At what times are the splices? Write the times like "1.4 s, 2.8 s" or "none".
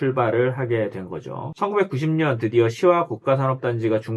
1.5 s